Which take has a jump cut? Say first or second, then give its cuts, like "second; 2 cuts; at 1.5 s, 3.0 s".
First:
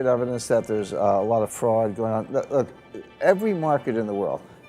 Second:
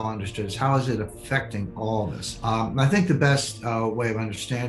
second; 1 cut; at 2.3 s